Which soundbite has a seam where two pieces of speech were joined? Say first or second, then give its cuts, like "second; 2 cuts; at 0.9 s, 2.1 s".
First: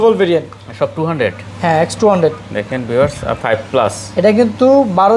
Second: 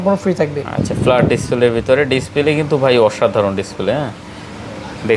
first; 1 cut; at 3.4 s